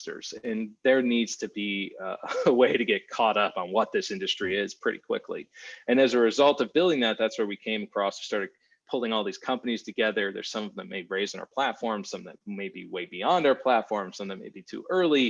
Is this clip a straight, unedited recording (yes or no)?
yes